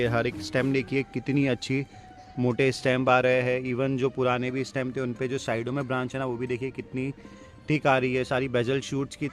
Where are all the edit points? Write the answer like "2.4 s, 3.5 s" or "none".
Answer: none